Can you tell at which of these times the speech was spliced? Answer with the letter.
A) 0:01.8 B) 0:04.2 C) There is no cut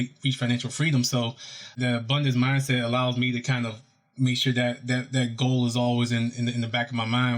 A